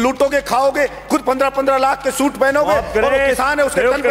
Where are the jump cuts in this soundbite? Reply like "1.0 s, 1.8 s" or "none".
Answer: none